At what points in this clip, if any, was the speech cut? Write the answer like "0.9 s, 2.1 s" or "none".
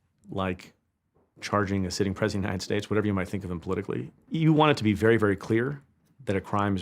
4.2 s

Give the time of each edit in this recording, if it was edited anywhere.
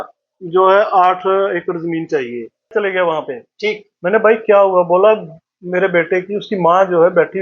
2.7 s

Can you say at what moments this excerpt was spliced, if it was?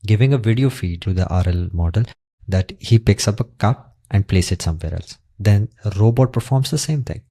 1.0 s

